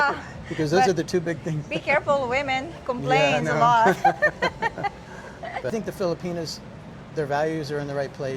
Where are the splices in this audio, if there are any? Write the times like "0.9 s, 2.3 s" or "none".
5.7 s